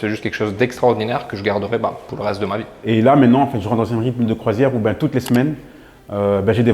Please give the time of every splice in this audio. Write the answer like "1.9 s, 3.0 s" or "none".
2.8 s